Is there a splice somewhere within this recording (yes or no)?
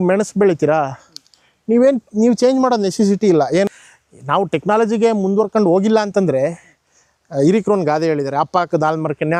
yes